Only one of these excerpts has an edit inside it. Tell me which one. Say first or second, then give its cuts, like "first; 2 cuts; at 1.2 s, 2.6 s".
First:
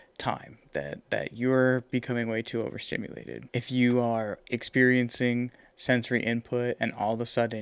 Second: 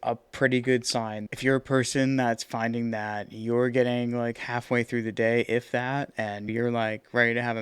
second; 2 cuts; at 1.2 s, 6.5 s